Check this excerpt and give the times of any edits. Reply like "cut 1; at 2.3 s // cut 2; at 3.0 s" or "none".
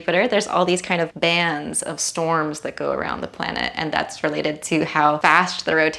cut 1; at 1.1 s // cut 2; at 5.2 s